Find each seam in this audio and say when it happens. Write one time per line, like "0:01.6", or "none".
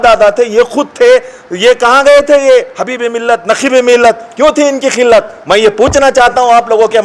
none